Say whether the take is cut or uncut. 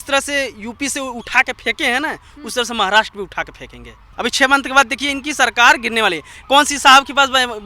cut